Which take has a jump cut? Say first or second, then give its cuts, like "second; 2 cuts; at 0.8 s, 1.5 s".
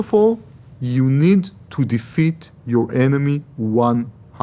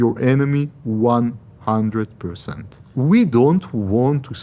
second; 1 cut; at 2.9 s